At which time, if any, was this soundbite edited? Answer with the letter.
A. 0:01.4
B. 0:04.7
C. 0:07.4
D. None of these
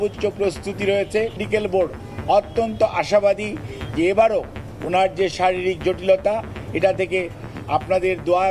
A